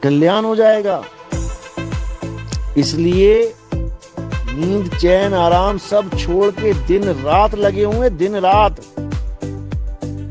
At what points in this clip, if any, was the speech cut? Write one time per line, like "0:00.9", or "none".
0:09.4